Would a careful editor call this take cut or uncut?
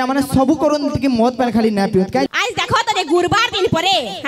cut